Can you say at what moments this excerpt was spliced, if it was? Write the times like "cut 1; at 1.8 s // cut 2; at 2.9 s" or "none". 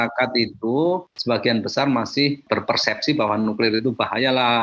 cut 1; at 1.1 s // cut 2; at 2.4 s

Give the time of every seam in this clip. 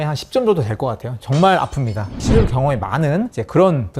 cut 1; at 2.2 s

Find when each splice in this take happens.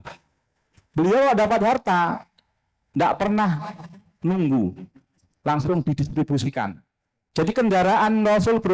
none

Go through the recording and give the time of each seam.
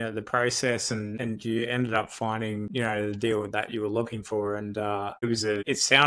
cut 1; at 1.1 s // cut 2; at 2.7 s // cut 3; at 5.3 s

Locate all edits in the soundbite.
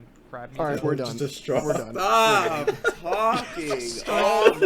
none

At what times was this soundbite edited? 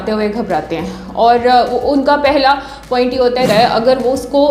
cut 1; at 3.5 s

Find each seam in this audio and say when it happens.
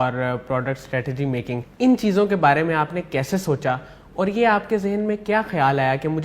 cut 1; at 1.7 s

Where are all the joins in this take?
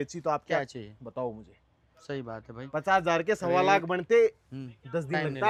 none

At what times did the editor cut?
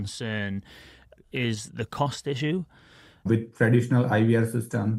cut 1; at 1.2 s // cut 2; at 3.3 s

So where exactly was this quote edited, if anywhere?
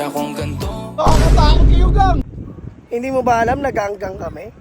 cut 1; at 2.3 s

